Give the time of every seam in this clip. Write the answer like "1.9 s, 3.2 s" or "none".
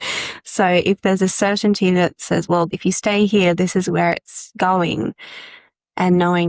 2.7 s